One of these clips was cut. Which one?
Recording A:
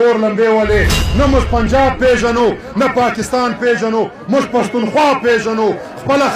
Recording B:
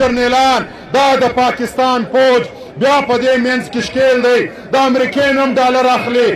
A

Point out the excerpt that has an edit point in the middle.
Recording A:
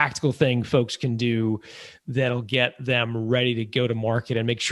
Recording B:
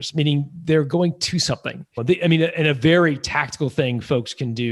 B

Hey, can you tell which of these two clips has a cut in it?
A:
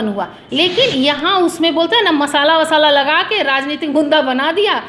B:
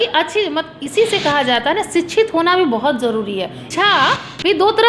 B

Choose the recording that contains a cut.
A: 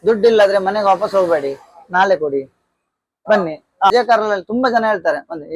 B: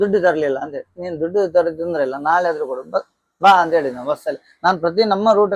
A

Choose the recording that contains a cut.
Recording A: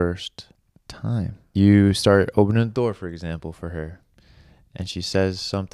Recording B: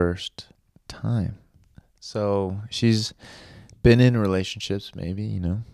A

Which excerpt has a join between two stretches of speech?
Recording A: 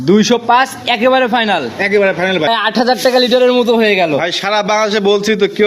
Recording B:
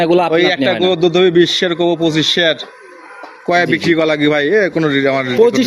A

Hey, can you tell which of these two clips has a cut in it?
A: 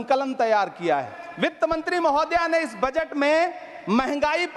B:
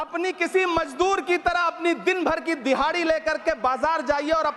A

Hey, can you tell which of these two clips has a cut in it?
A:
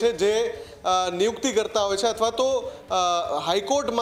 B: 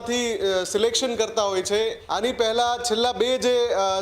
B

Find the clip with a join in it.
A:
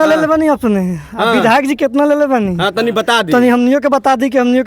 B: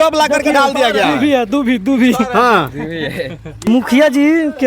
B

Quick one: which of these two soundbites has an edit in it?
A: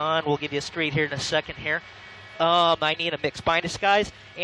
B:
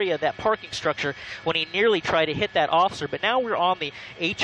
A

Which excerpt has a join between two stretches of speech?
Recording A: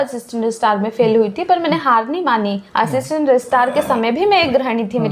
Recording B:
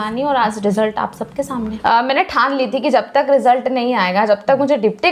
B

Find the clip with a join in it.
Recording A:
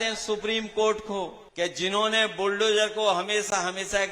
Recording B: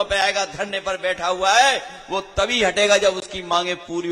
A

